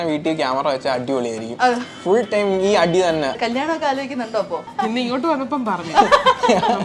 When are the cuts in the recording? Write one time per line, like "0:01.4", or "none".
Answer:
0:03.4
0:04.7